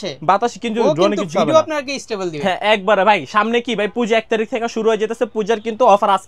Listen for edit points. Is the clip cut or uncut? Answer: uncut